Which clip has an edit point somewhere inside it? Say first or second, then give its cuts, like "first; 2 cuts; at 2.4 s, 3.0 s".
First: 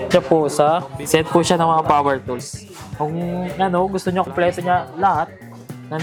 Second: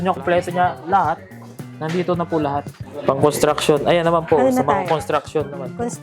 second; 1 cut; at 2.9 s